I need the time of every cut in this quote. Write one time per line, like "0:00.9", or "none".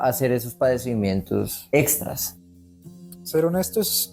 0:01.6
0:02.6